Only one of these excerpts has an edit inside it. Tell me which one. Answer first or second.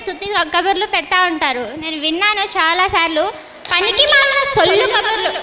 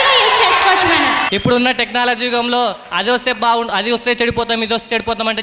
second